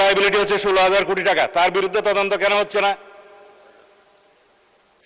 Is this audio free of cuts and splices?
yes; 0 cuts

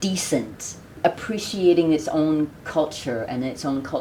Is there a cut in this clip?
no; 0 cuts

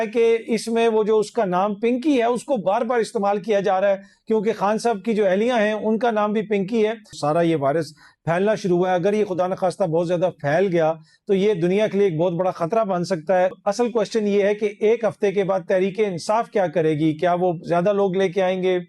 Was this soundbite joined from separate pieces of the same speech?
yes; 2 cuts; at 7.2 s, 13.5 s

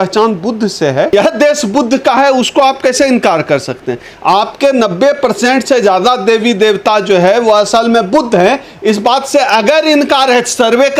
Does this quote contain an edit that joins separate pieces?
yes; 1 cut; at 1.1 s

